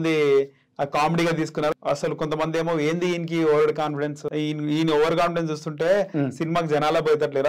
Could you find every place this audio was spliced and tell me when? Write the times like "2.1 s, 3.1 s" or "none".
1.8 s, 4.2 s